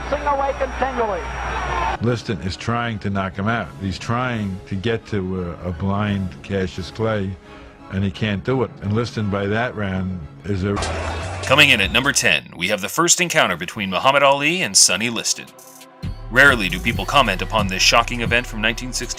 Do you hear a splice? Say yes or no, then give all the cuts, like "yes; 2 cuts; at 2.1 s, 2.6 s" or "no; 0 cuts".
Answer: no; 0 cuts